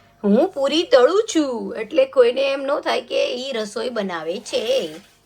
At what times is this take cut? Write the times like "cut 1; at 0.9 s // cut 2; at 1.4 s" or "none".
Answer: none